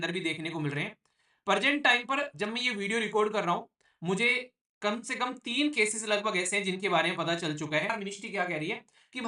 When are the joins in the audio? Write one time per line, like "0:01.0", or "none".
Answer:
0:07.9